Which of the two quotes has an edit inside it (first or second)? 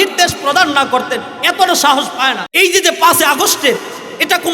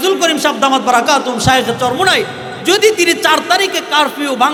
first